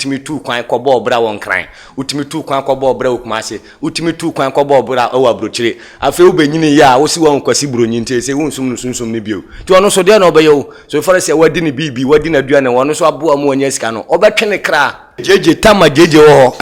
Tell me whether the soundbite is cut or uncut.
cut